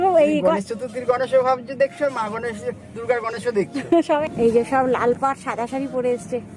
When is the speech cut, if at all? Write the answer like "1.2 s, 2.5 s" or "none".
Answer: 4.2 s